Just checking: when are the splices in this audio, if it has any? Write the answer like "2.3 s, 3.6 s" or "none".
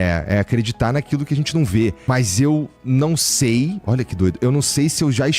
2.0 s